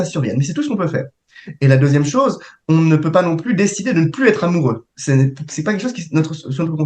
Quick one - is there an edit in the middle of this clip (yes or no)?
no